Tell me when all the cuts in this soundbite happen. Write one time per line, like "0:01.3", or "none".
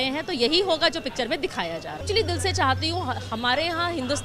0:02.0